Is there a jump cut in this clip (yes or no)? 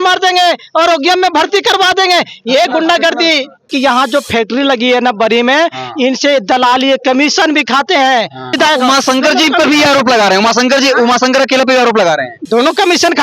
yes